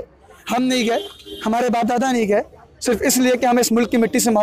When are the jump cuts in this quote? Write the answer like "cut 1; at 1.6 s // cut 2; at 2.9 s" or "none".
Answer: none